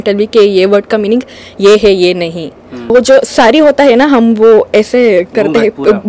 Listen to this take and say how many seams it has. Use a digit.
1